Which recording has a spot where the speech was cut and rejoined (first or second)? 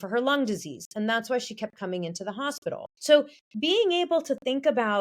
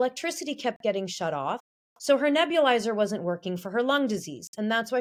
first